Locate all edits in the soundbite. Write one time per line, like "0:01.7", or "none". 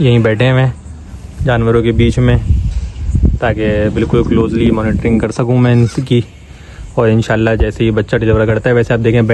none